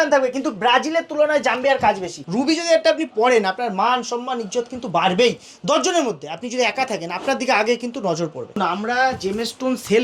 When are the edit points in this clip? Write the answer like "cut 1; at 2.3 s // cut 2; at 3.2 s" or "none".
cut 1; at 2.1 s // cut 2; at 8.6 s

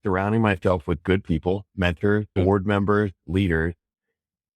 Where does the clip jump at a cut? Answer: cut 1; at 2.3 s

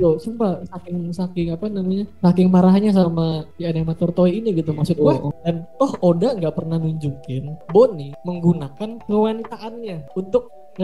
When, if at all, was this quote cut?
cut 1; at 5.3 s

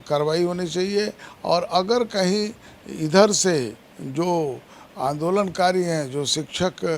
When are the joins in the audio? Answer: none

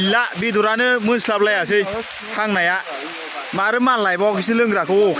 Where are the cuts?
none

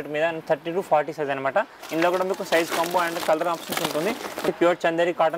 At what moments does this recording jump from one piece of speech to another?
cut 1; at 4.4 s

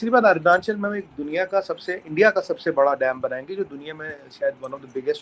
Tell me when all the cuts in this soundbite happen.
none

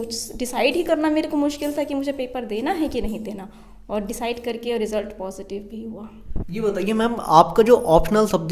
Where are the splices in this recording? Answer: none

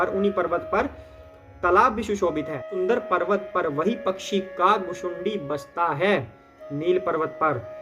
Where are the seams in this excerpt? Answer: cut 1; at 2.7 s

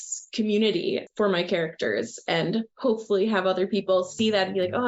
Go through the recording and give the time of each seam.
none

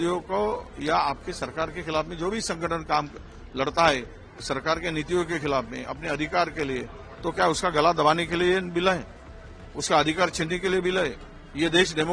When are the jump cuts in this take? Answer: none

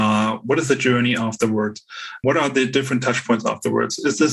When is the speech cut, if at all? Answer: cut 1; at 2.2 s

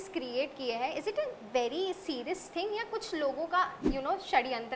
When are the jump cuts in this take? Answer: cut 1; at 3.8 s

